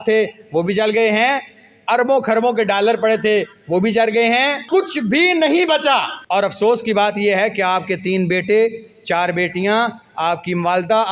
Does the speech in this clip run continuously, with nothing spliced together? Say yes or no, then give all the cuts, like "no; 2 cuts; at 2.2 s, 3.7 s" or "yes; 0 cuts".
no; 2 cuts; at 4.6 s, 6.2 s